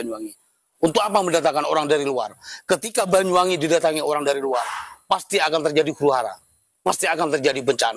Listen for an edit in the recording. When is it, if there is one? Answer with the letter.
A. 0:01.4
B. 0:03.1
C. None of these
C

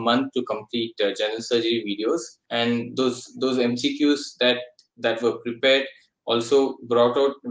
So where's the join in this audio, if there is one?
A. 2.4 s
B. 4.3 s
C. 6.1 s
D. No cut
A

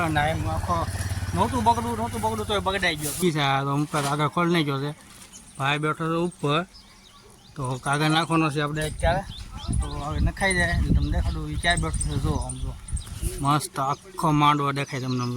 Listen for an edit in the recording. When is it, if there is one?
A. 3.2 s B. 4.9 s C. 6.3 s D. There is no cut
A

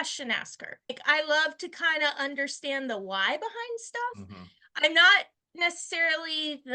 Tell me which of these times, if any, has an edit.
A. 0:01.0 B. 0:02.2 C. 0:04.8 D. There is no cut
A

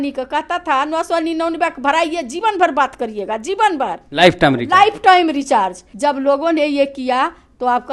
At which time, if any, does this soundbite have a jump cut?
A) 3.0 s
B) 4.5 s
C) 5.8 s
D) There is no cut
C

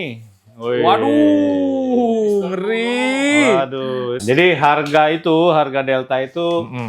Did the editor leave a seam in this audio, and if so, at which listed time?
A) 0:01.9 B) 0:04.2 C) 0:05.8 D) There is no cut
B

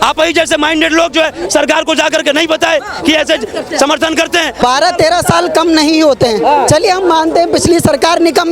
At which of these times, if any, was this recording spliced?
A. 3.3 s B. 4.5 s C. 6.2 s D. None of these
B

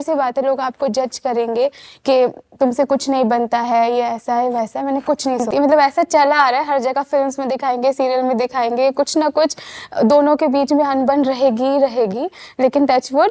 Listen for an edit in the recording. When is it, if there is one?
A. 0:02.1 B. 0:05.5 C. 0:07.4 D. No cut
B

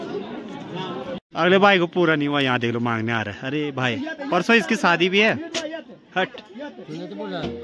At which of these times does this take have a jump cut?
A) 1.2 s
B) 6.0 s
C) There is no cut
C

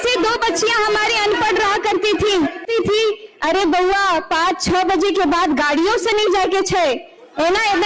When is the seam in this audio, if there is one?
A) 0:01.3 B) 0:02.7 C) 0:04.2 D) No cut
B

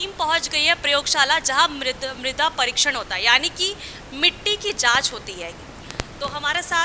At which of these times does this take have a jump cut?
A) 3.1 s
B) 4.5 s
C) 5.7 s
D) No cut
D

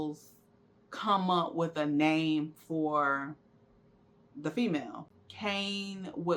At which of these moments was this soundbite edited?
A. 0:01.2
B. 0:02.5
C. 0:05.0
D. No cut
C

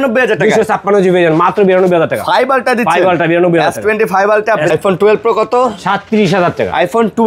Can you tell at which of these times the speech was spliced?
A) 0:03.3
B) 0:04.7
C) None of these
B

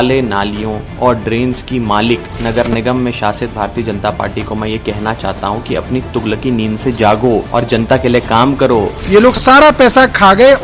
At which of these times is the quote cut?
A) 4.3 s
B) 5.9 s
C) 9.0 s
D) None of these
C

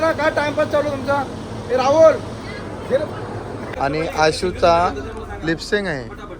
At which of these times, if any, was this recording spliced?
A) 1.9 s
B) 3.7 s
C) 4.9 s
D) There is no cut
B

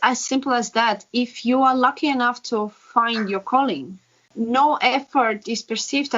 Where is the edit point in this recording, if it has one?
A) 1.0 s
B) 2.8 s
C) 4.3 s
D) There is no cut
C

